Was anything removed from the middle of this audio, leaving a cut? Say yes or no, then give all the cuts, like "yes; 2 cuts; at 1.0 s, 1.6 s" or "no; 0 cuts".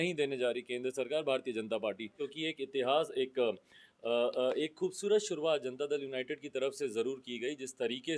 yes; 1 cut; at 2.2 s